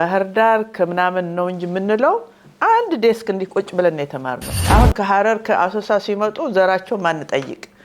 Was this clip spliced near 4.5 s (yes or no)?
yes